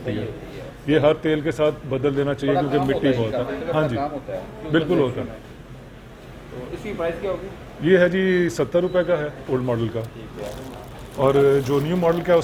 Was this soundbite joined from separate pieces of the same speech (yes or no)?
no